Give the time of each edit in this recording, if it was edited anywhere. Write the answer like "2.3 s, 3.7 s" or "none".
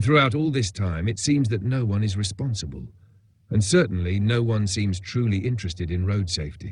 none